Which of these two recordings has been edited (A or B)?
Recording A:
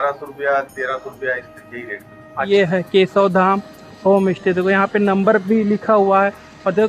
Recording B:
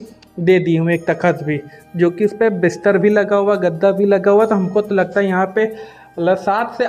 A